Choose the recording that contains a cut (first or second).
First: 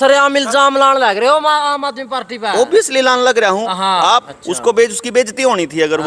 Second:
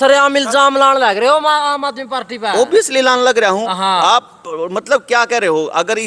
first